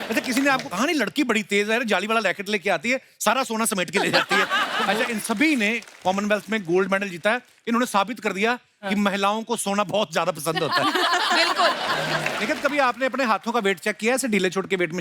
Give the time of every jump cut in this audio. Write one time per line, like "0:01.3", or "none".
0:04.8
0:12.3